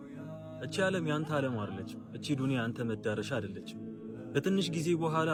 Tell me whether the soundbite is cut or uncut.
uncut